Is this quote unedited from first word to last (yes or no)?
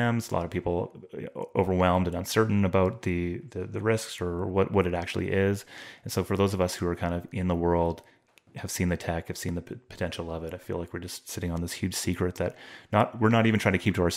yes